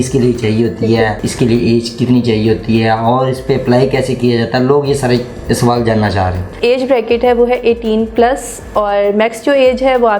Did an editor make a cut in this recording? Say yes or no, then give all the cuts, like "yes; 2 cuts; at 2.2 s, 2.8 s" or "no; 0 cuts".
yes; 2 cuts; at 1.3 s, 6.6 s